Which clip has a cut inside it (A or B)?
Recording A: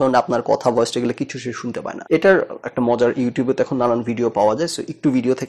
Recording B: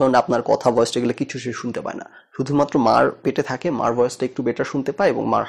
A